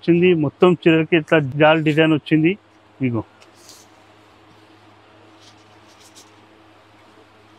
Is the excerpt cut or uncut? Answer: uncut